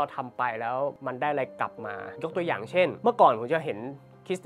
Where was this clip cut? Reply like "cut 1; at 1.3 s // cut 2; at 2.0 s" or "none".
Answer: cut 1; at 1.0 s // cut 2; at 2.1 s // cut 3; at 3.0 s